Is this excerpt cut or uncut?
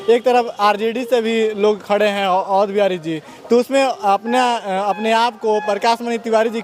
uncut